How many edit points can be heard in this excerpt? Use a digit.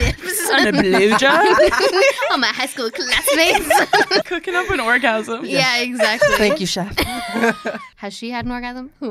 2